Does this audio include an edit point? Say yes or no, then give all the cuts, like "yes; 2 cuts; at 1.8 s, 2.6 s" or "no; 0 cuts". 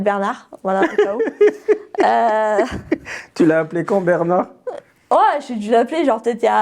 no; 0 cuts